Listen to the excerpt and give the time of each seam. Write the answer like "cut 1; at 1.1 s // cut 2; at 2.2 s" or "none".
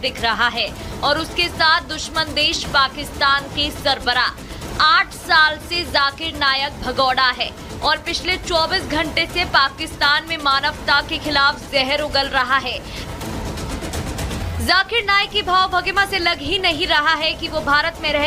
none